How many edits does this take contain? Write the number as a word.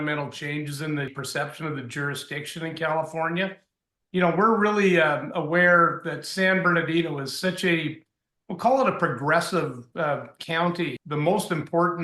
two